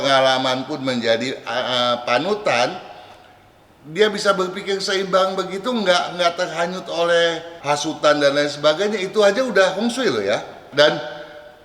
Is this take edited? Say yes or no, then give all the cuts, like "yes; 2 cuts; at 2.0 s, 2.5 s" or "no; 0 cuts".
yes; 2 cuts; at 7.5 s, 10.6 s